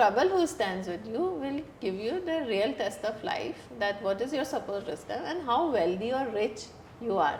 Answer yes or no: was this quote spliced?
no